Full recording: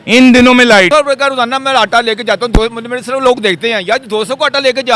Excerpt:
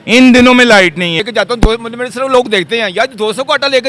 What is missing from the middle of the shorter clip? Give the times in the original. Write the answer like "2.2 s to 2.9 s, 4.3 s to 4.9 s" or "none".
0.9 s to 1.8 s